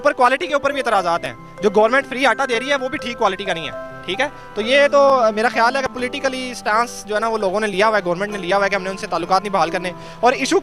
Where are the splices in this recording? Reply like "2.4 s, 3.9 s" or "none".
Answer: none